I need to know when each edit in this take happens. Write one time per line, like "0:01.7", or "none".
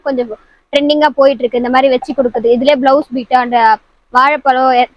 none